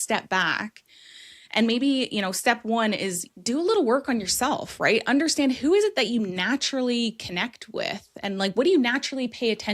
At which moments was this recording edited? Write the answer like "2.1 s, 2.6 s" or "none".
3.2 s